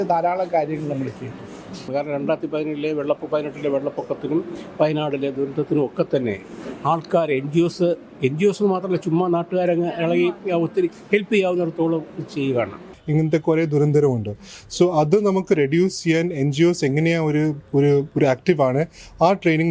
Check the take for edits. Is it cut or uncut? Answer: cut